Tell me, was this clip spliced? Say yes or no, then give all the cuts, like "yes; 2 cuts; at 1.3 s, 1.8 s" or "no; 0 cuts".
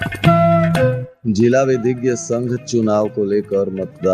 yes; 1 cut; at 1.1 s